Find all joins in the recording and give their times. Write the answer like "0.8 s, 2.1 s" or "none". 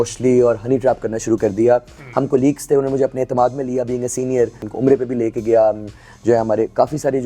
4.7 s